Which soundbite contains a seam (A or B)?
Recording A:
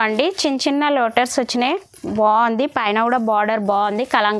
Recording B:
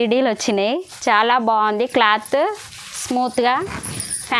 B